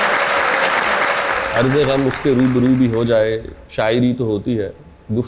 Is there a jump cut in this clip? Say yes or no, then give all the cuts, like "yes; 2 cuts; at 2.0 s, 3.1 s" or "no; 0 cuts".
yes; 1 cut; at 1.0 s